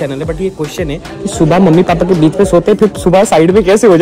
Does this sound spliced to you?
no; 0 cuts

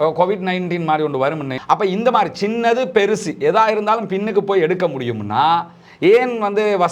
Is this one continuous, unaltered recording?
no; 1 cut; at 1.5 s

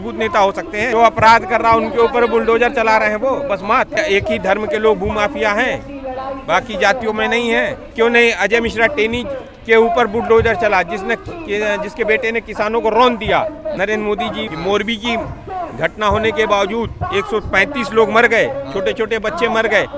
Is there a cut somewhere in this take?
yes; 4 cuts; at 0.9 s, 4.0 s, 7.9 s, 14.2 s

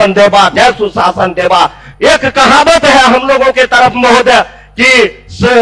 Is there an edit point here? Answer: yes; 1 cut; at 1.9 s

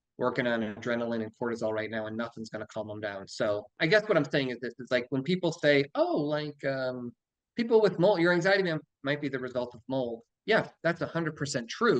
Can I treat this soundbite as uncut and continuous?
no; 1 cut; at 3.8 s

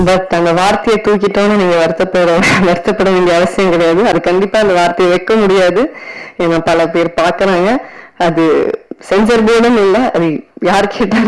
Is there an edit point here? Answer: no; 0 cuts

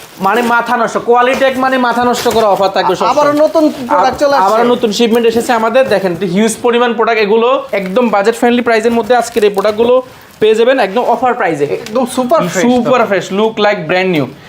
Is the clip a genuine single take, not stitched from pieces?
no; 2 cuts; at 7.7 s, 11.9 s

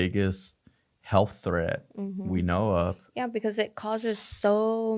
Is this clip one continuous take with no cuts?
yes; 0 cuts

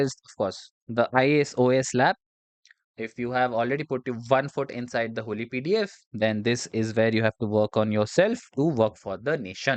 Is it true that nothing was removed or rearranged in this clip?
yes; 0 cuts

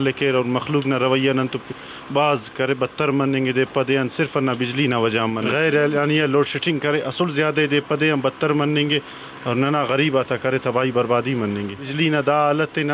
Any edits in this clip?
yes; 2 cuts; at 5.5 s, 11.8 s

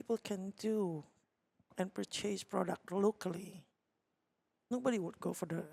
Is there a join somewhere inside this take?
no; 0 cuts

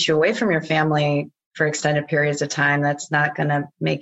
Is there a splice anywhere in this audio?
no; 0 cuts

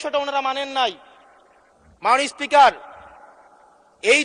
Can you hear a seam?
no; 0 cuts

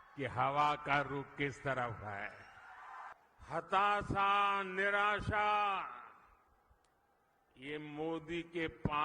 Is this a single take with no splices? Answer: no; 1 cut; at 3.1 s

